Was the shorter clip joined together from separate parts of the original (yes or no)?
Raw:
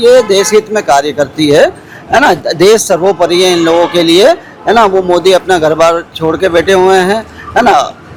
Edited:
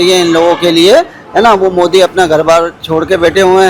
no